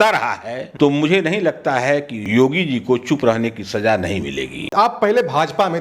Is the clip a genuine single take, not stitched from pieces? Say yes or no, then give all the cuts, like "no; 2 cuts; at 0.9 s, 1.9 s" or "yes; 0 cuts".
no; 2 cuts; at 2.2 s, 4.7 s